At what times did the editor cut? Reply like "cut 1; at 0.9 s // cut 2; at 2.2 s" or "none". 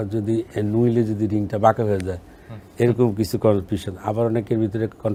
none